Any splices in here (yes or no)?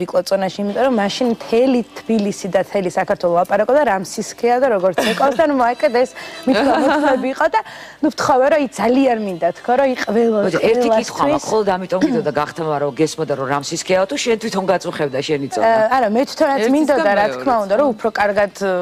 yes